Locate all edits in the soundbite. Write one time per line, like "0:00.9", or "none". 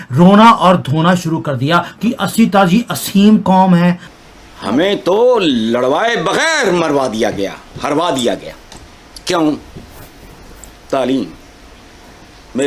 0:04.1